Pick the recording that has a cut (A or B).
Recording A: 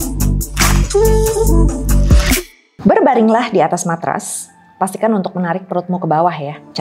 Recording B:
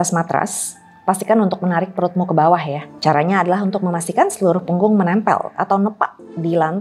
A